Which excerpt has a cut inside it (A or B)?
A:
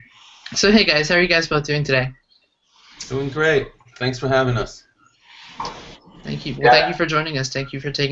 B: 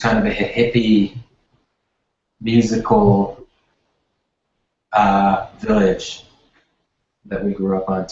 B